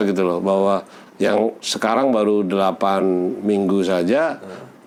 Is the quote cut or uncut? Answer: uncut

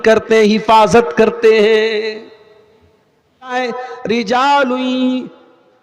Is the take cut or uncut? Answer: cut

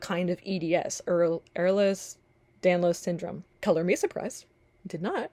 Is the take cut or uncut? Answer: uncut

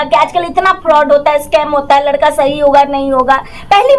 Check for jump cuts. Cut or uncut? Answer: uncut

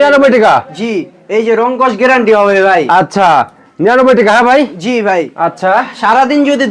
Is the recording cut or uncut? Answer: uncut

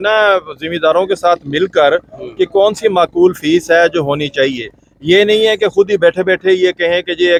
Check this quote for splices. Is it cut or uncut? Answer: uncut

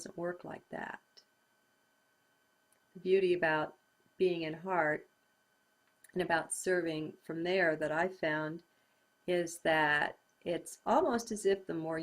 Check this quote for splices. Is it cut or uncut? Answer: cut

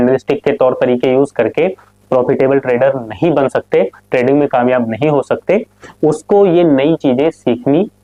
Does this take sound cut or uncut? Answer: uncut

